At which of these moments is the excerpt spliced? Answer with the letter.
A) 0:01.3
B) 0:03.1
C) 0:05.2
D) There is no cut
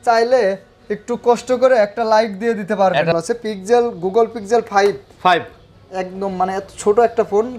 B